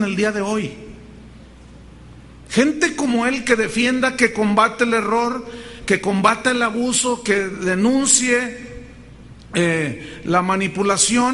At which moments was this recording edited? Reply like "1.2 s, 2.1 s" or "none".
9.9 s